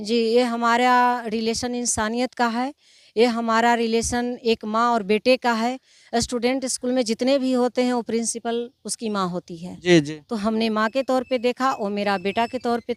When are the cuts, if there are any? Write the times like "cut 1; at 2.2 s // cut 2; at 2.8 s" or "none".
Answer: none